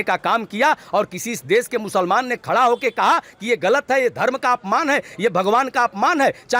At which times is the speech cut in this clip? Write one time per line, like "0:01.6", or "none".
none